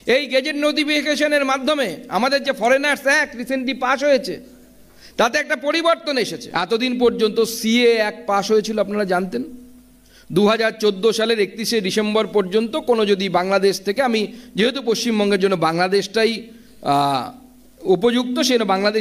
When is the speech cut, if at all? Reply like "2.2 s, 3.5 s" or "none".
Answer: 6.4 s